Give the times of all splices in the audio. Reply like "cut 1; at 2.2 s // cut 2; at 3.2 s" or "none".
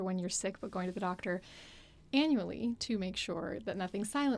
none